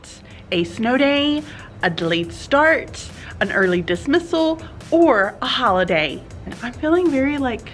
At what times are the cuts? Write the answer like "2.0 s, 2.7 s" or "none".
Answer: 6.6 s